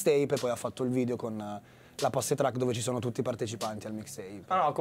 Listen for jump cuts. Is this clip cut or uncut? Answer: cut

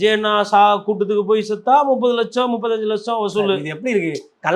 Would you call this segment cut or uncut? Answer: uncut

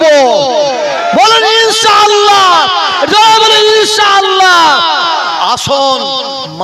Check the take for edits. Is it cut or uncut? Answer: uncut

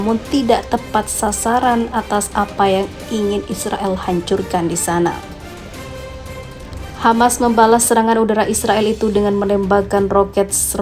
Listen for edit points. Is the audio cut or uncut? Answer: cut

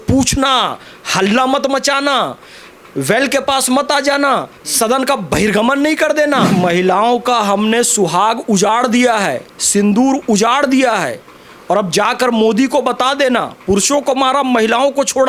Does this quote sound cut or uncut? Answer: cut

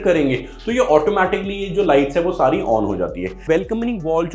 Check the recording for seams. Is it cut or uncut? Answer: cut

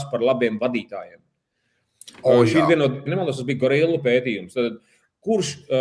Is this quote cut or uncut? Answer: cut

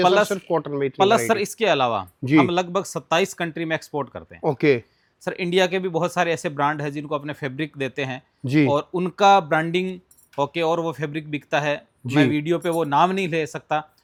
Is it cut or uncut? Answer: uncut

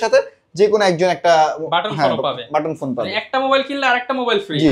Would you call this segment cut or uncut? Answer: uncut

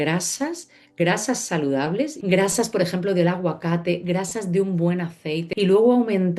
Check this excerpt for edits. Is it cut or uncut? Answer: cut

